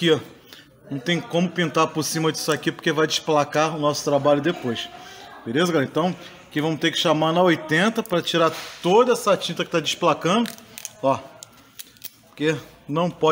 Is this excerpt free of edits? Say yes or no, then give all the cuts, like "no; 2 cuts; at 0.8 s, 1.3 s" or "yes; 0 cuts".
yes; 0 cuts